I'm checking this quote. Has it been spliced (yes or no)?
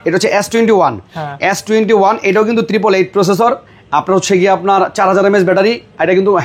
no